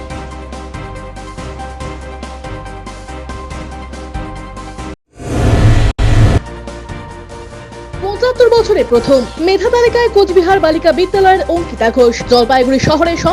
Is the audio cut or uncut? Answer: cut